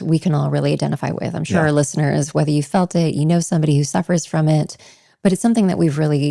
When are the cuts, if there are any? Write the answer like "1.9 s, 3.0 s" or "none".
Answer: none